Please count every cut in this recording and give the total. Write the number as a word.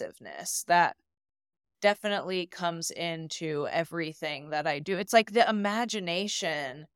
zero